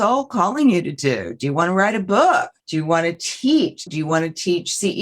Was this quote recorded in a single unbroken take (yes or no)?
no